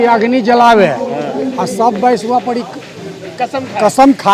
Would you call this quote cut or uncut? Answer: uncut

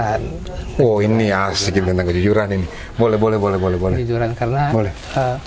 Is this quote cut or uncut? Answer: uncut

